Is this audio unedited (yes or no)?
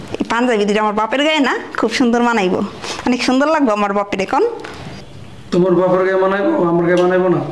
yes